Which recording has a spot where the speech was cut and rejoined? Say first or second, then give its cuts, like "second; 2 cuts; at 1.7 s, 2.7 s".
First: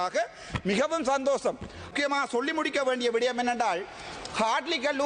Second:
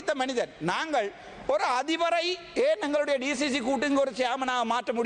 first; 1 cut; at 1.9 s